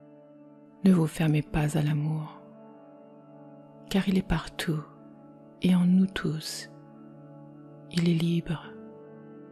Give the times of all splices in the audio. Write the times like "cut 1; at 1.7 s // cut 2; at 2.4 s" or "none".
cut 1; at 0.8 s // cut 2; at 2.3 s // cut 3; at 3.9 s // cut 4; at 6.4 s // cut 5; at 7.9 s // cut 6; at 8.6 s